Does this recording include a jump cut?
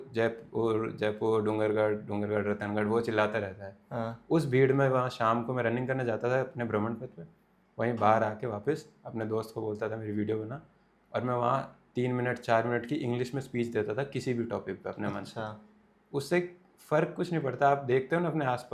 no; 0 cuts

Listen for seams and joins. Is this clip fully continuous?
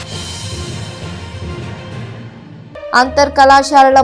no; 1 cut; at 2.6 s

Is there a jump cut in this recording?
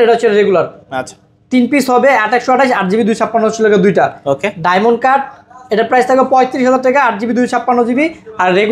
no; 0 cuts

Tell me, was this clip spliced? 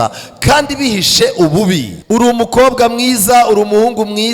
yes; 1 cut; at 1.9 s

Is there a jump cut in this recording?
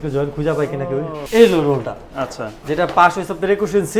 yes; 1 cut; at 1.2 s

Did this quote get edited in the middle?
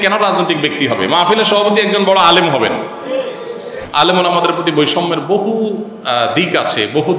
yes; 1 cut; at 3.8 s

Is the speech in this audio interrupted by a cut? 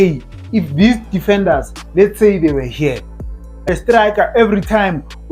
yes; 1 cut; at 3.7 s

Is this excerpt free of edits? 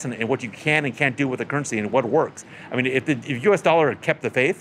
yes; 0 cuts

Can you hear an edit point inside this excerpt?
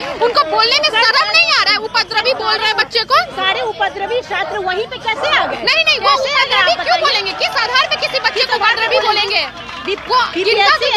no; 0 cuts

